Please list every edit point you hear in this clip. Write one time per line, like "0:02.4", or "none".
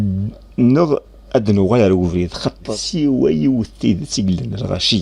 0:02.7